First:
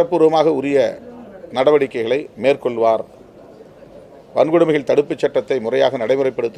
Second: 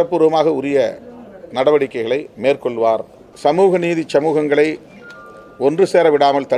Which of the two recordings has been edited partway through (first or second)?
second